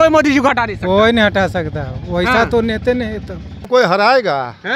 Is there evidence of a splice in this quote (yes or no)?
yes